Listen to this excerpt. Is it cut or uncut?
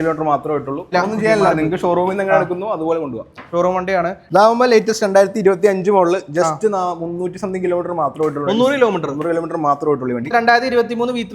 cut